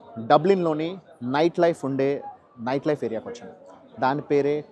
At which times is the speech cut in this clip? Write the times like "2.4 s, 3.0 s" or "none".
none